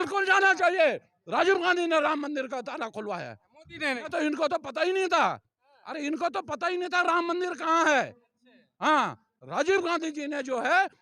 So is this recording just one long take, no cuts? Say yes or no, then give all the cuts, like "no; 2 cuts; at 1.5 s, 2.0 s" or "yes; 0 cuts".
yes; 0 cuts